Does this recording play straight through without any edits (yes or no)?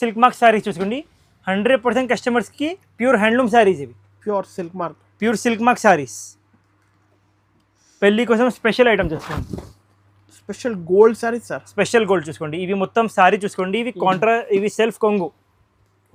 yes